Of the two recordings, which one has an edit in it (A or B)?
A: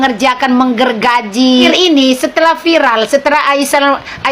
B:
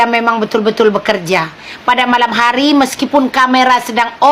A